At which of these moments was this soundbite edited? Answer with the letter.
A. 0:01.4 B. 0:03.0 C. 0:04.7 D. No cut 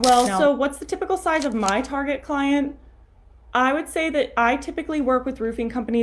D